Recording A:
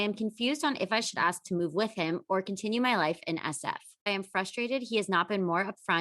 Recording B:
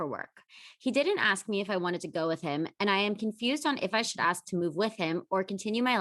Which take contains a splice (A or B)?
A